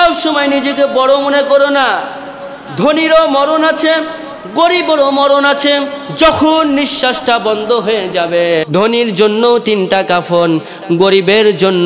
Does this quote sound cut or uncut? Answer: cut